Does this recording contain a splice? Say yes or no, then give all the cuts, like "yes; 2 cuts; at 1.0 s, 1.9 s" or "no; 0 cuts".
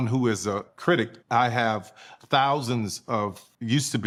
no; 0 cuts